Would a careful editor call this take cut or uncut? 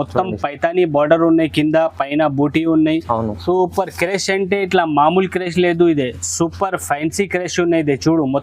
uncut